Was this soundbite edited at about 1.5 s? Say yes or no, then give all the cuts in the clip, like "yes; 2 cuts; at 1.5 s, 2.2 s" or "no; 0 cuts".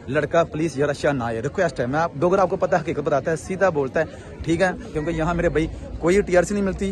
no; 1 cut; at 5.0 s